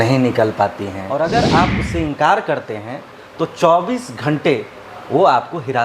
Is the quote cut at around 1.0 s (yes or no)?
yes